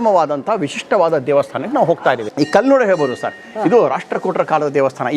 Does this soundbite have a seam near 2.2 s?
yes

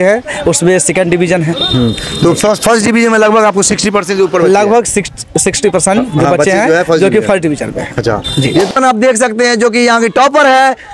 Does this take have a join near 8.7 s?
yes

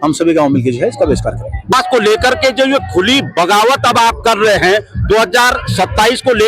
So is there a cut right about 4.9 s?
no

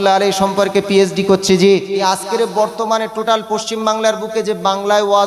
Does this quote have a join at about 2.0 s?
yes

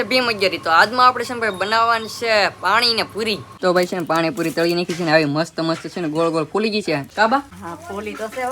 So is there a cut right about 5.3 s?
no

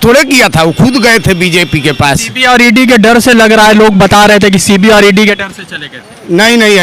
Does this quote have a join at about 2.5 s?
no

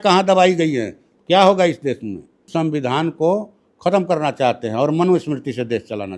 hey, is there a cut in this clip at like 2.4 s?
yes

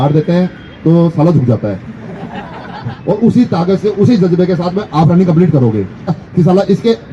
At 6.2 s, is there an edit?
yes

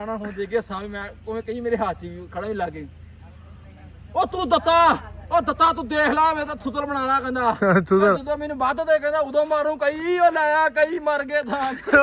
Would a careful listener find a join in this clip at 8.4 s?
no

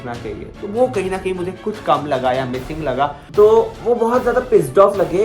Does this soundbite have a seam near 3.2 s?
yes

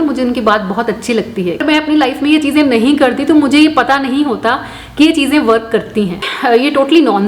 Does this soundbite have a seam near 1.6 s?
yes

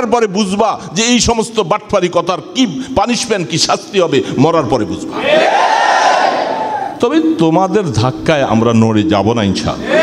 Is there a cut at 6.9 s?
yes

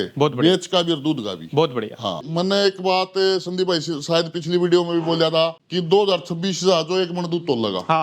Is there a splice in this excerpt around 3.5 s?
no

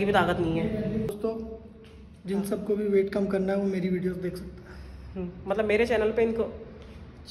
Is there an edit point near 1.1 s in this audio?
yes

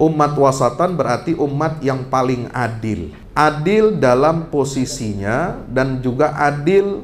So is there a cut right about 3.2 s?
yes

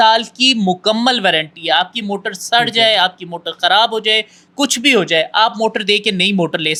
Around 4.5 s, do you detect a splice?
no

